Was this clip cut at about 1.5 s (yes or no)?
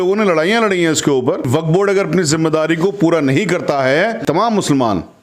yes